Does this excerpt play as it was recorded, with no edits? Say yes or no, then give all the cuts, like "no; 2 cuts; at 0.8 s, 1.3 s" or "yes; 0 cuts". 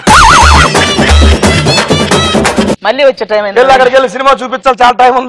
yes; 0 cuts